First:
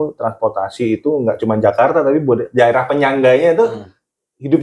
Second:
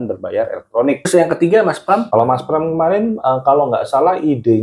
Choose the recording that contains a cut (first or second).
second